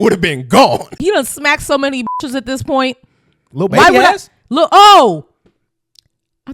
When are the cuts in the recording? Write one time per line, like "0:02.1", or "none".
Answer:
0:00.9